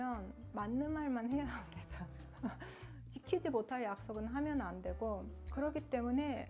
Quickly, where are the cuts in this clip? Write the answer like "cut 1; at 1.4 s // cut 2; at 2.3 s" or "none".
cut 1; at 5.4 s

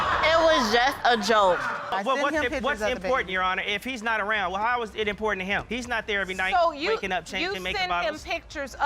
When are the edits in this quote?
cut 1; at 1.8 s

